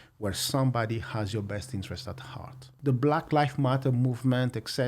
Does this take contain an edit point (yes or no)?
yes